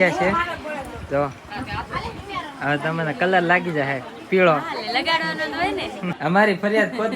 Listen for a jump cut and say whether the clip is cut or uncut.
cut